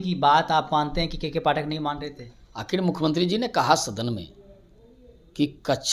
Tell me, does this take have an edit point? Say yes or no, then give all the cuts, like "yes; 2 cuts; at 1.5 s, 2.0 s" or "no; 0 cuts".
no; 0 cuts